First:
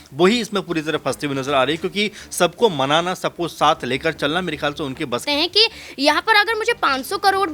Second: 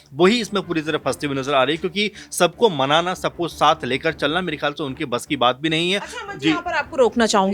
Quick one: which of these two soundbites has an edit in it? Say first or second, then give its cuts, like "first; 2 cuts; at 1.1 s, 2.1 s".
first; 1 cut; at 5.2 s